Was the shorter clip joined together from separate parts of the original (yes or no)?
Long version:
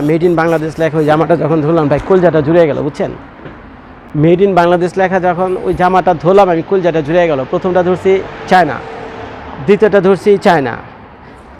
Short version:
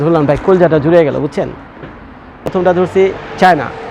yes